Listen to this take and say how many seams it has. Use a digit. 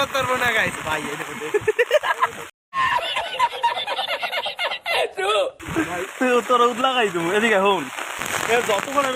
0